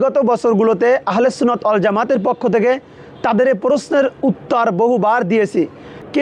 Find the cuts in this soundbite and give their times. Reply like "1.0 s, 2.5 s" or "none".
none